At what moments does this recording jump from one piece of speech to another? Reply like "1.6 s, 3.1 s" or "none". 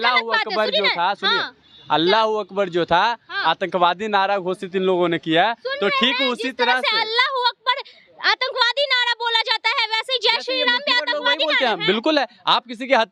none